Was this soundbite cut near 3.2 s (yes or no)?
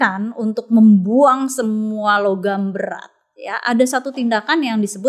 no